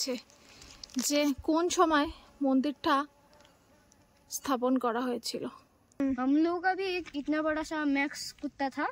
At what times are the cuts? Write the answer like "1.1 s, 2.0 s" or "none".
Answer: 6.0 s